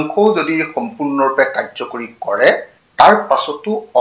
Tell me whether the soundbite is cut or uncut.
cut